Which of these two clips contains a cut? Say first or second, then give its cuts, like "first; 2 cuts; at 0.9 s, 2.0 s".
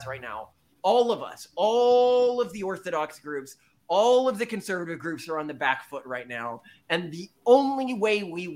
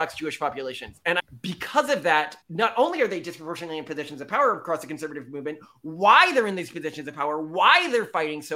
second; 2 cuts; at 1.2 s, 2.4 s